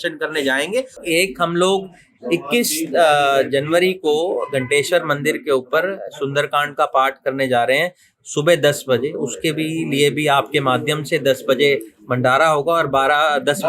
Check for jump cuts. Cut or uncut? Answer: cut